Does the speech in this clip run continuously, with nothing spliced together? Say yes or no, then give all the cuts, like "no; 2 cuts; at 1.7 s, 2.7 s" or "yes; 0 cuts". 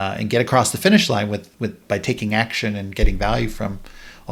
yes; 0 cuts